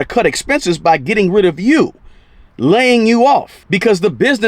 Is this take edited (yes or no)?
no